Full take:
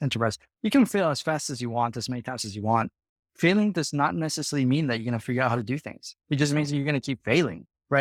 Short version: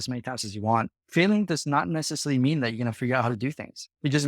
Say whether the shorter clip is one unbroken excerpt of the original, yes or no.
no